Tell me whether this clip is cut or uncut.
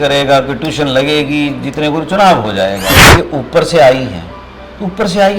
cut